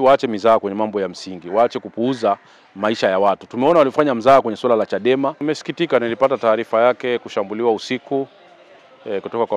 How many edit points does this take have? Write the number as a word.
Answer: one